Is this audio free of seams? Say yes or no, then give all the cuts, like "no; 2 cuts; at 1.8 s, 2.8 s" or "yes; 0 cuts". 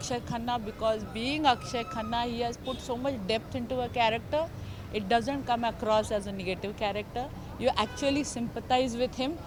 yes; 0 cuts